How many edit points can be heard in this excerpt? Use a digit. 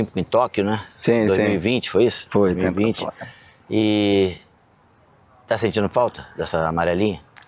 0